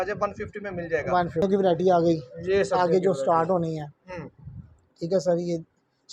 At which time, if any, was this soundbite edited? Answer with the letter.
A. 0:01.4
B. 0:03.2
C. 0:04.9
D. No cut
A